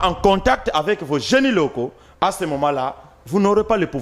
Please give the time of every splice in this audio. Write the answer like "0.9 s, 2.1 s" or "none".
none